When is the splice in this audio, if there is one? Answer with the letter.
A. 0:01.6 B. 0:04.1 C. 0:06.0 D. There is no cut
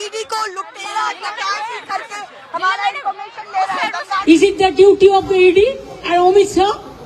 B